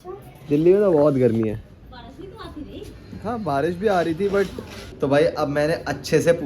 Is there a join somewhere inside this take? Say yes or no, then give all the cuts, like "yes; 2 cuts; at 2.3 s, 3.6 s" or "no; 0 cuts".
yes; 1 cut; at 4.9 s